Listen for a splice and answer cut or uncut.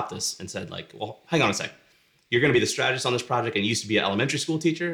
uncut